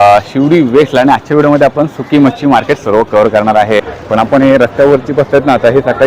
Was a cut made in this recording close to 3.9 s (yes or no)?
yes